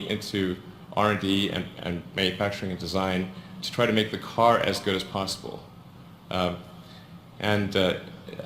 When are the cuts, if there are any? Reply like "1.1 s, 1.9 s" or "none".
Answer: 3.1 s, 5.0 s